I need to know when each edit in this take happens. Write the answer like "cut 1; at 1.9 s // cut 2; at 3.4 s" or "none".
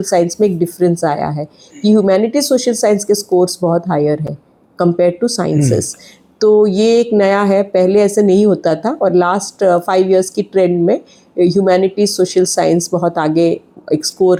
none